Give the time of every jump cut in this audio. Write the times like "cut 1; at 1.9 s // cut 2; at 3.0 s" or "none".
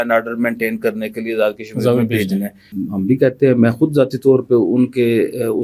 cut 1; at 2.6 s